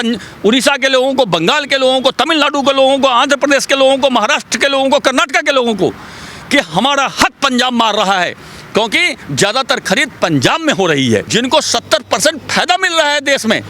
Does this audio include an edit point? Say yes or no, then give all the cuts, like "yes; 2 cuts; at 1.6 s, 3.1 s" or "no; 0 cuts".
yes; 1 cut; at 11.3 s